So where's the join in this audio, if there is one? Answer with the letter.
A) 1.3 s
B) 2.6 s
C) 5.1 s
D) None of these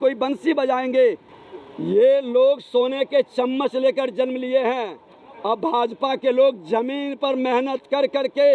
A